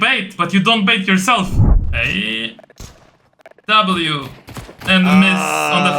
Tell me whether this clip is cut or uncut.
cut